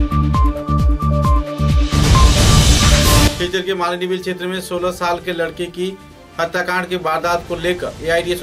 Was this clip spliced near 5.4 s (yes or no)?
no